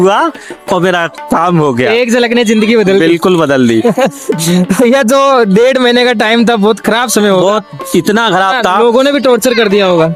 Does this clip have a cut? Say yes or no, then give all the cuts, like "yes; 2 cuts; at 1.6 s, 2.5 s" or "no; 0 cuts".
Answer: no; 0 cuts